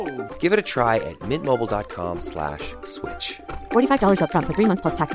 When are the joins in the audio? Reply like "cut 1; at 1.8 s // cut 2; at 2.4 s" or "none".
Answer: none